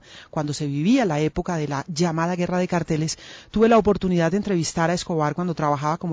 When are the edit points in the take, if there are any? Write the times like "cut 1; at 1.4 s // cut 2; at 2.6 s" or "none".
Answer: cut 1; at 4.7 s